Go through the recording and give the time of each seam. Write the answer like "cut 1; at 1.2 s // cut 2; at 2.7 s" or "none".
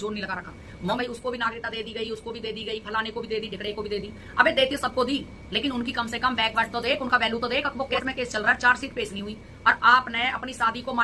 cut 1; at 1.0 s // cut 2; at 8.0 s